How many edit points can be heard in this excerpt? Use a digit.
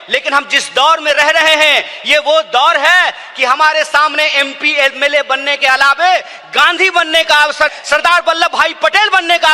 1